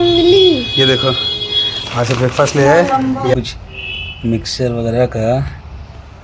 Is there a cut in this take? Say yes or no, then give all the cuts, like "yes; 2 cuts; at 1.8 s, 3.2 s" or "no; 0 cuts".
yes; 1 cut; at 3.3 s